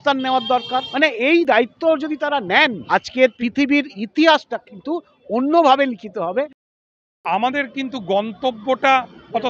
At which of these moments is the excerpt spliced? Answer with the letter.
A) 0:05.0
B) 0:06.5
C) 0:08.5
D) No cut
B